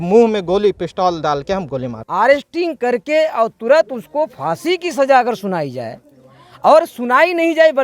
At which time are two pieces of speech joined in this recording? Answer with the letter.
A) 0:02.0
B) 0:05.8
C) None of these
A